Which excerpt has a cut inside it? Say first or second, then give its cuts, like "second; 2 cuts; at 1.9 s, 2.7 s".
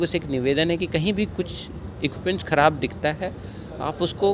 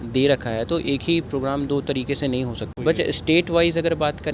second; 1 cut; at 2.6 s